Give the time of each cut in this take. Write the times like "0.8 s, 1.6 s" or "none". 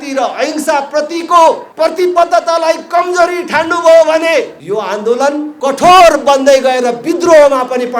1.7 s, 4.6 s, 5.5 s